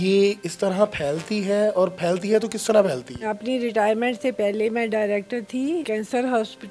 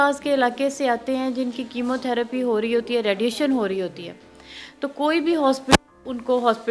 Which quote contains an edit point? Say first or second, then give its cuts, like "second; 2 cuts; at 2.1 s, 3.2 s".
first; 2 cuts; at 3.2 s, 5.9 s